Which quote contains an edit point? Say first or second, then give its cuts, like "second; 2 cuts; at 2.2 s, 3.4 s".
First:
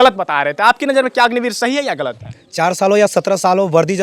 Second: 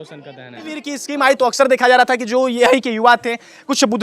second; 1 cut; at 1.0 s